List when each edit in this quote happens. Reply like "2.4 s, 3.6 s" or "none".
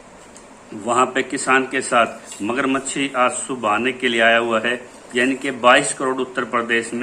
5.0 s